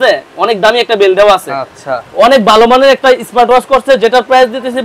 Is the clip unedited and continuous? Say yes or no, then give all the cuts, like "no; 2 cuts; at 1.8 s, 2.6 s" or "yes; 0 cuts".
yes; 0 cuts